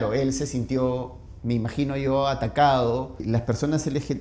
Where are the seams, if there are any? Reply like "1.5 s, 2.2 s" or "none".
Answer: 3.2 s